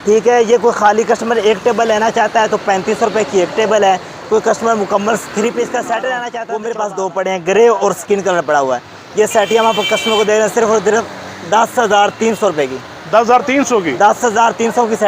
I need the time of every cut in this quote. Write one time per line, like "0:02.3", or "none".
0:06.3